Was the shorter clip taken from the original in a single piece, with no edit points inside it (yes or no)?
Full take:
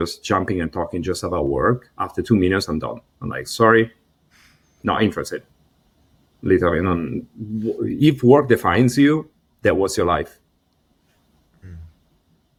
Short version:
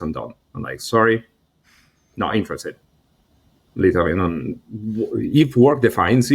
yes